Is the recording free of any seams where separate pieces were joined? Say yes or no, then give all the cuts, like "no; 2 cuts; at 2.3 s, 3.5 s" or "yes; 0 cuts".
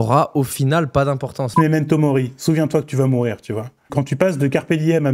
no; 2 cuts; at 1.5 s, 3.9 s